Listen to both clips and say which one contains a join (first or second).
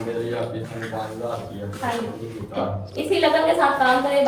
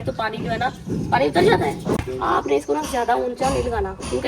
second